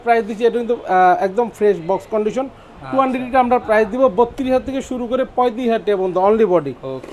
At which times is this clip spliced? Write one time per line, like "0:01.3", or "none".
none